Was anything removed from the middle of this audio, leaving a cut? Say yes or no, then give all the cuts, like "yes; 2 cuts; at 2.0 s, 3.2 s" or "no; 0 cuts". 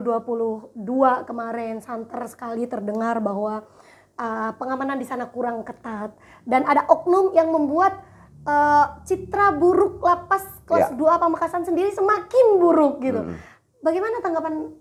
no; 0 cuts